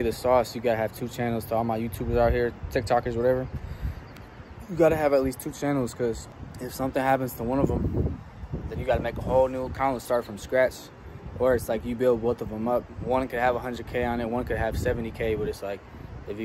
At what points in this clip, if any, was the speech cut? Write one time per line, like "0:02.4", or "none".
none